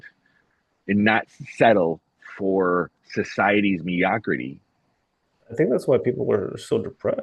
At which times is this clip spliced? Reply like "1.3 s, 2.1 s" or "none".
none